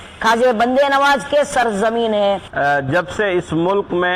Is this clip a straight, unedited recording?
no; 1 cut; at 2.5 s

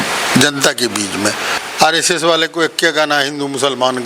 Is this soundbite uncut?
no; 1 cut; at 1.5 s

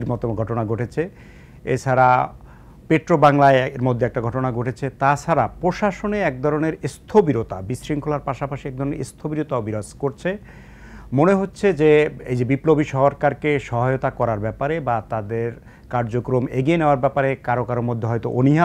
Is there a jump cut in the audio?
no; 0 cuts

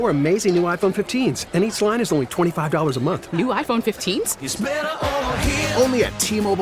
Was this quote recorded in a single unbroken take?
yes; 0 cuts

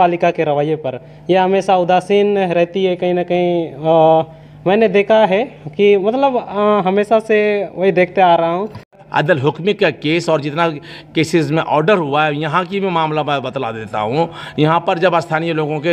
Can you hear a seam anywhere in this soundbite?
yes; 1 cut; at 9.0 s

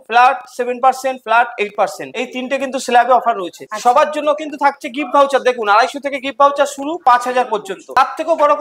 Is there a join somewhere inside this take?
no; 0 cuts

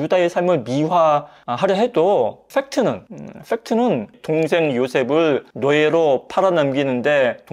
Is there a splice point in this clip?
no; 0 cuts

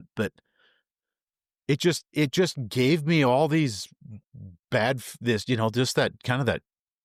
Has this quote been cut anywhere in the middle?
no; 0 cuts

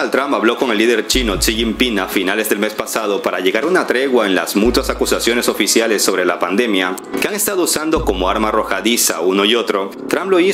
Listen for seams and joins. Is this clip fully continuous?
yes; 0 cuts

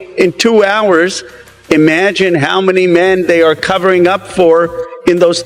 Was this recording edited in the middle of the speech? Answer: no; 0 cuts

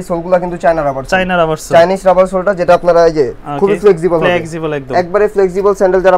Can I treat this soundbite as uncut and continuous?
yes; 0 cuts

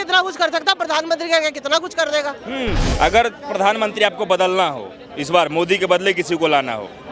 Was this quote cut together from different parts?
yes; 1 cut; at 2.9 s

